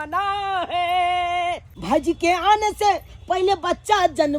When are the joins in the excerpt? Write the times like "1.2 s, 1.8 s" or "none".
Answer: 1.7 s